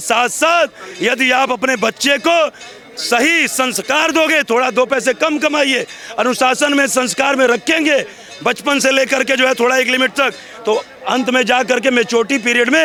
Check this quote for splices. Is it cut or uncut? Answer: uncut